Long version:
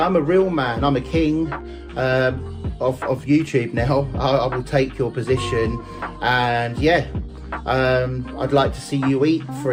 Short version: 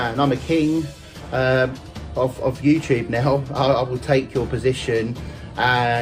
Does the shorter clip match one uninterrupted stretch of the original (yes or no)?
yes